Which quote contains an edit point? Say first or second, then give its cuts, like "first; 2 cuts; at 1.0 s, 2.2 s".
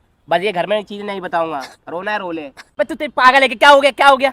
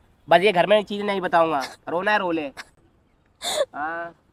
first; 1 cut; at 2.6 s